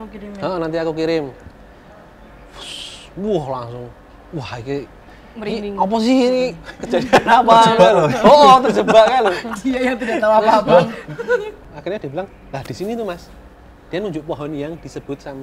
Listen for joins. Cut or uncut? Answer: cut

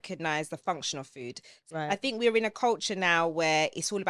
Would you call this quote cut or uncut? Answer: cut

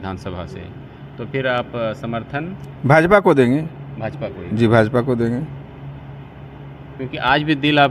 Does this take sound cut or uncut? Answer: uncut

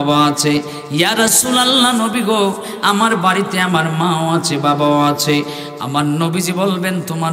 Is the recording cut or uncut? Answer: uncut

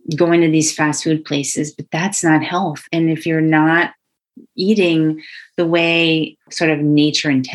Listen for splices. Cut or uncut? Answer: cut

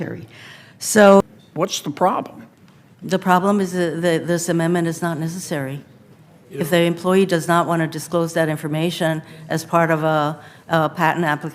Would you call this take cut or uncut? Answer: cut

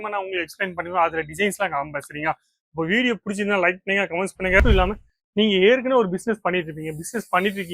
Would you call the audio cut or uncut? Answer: cut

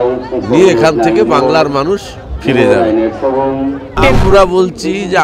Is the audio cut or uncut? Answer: cut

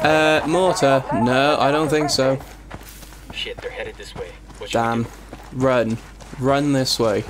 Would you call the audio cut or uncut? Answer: uncut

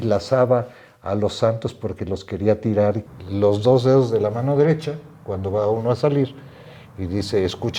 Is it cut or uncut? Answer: cut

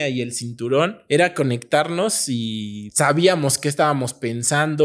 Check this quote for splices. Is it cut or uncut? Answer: cut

